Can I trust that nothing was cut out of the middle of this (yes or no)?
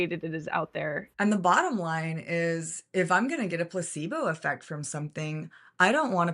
no